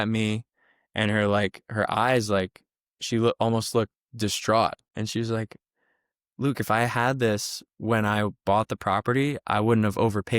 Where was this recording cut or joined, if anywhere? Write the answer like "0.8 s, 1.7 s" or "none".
4.8 s